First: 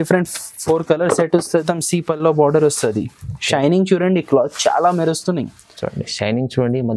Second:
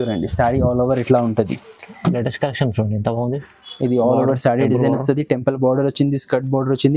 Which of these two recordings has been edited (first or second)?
first